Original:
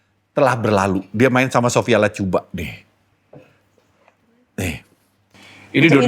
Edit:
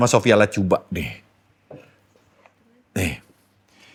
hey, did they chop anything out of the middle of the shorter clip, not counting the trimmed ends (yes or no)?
no